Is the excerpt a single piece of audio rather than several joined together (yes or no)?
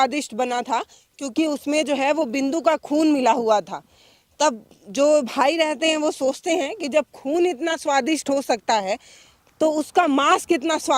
yes